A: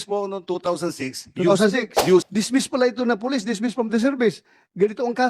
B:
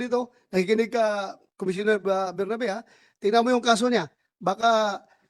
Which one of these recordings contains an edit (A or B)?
A